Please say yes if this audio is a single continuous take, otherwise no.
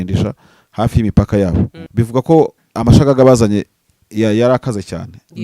no